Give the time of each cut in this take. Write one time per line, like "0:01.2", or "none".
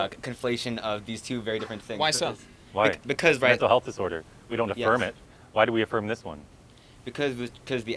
none